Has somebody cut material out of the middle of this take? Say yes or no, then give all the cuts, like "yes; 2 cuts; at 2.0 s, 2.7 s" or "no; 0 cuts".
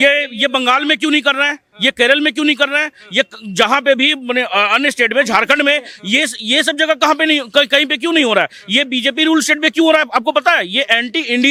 no; 0 cuts